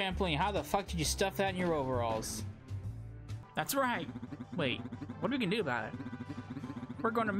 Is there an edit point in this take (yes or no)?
yes